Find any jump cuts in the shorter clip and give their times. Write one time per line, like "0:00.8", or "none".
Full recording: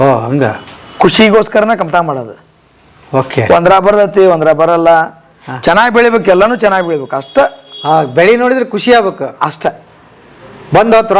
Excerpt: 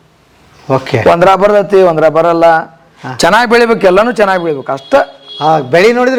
none